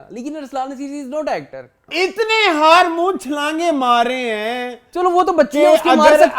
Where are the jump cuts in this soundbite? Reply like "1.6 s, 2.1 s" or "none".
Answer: 1.9 s